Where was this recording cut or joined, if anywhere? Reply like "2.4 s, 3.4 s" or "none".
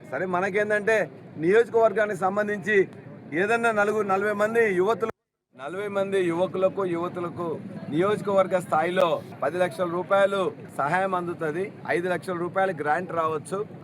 5.1 s